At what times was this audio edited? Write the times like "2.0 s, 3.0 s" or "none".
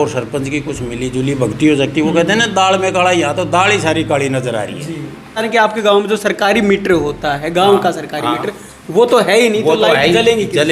5.4 s